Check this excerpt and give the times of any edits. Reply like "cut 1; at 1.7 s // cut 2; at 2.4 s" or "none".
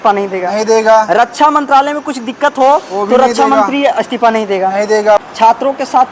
cut 1; at 5.2 s